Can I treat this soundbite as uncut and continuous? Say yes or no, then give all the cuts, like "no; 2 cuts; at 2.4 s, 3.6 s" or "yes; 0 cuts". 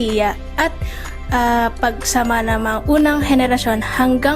no; 1 cut; at 2.2 s